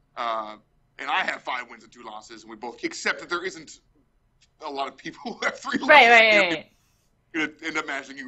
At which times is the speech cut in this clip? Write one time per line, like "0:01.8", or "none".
none

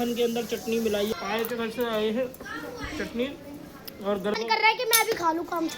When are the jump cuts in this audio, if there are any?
0:01.1
0:04.4

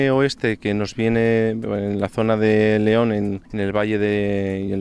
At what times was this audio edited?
0:03.4

